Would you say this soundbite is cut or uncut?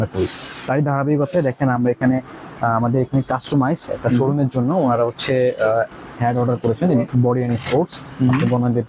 cut